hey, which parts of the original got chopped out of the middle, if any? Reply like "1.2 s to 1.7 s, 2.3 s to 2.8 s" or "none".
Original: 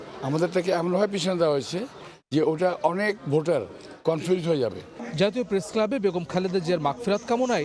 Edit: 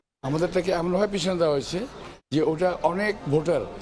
none

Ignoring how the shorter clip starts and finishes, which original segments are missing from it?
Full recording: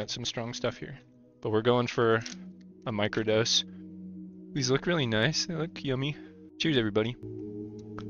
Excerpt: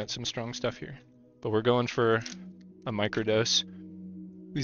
none

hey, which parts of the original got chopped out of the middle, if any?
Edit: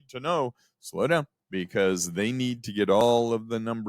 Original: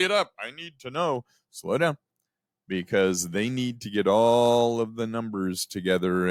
2.1 s to 2.6 s, 4.2 s to 4.5 s

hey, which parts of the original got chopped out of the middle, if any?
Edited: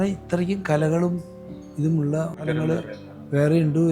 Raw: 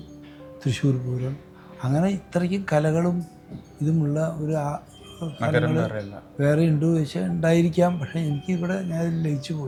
4.5 s to 5.5 s

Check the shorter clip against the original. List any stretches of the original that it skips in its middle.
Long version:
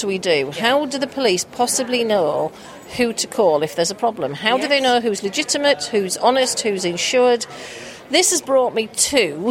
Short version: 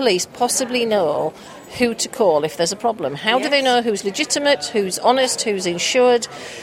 none

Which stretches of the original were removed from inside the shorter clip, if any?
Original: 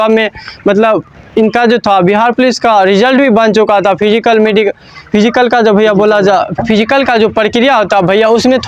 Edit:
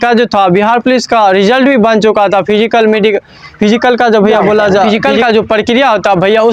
6.4 s to 6.7 s

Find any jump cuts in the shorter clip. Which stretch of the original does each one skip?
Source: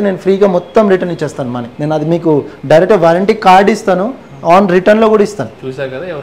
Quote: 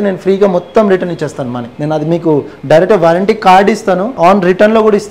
4.1 s to 4.4 s

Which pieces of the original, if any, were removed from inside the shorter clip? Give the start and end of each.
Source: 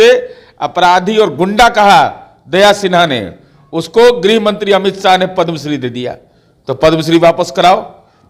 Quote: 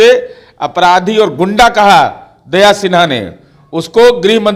none

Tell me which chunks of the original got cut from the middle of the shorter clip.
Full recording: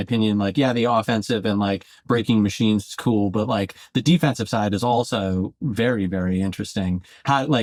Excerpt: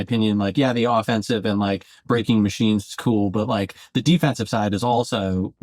none

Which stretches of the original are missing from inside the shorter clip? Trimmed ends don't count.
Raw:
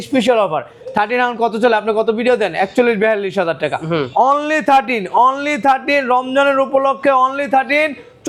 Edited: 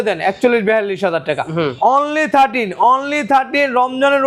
none

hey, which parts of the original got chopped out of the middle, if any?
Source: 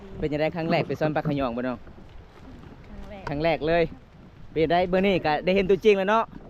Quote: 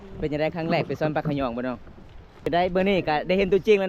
2.5 s to 4.7 s

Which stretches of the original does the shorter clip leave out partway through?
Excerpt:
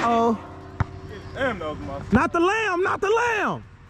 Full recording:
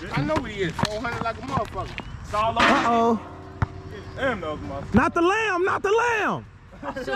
none

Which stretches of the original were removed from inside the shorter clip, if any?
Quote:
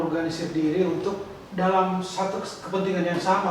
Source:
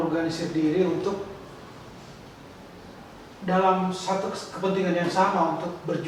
1.4 s to 3.3 s

